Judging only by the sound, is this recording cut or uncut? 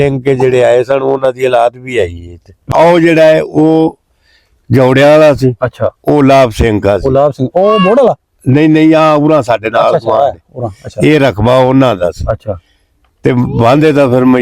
cut